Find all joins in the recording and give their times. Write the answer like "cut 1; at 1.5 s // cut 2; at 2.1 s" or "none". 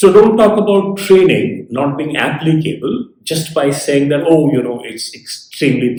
none